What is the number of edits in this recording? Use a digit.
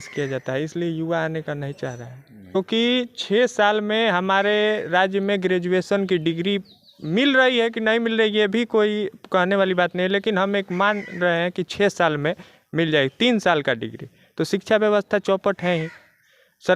1